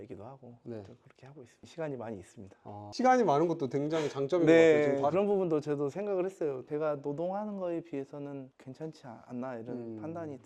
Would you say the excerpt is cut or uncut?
uncut